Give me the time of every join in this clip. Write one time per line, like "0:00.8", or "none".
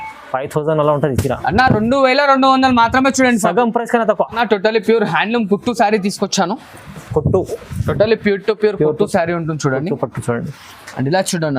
0:04.4